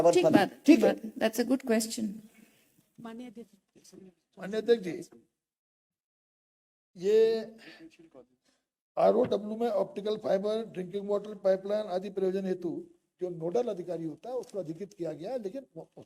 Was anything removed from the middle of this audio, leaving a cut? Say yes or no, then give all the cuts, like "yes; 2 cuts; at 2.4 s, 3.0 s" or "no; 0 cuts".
no; 0 cuts